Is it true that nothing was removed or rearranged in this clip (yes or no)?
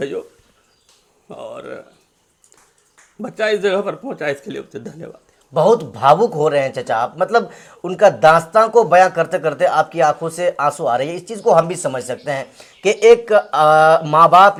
yes